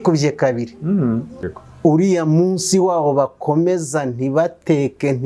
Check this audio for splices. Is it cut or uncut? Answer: cut